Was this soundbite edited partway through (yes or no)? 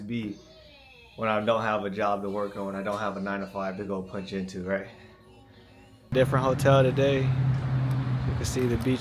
yes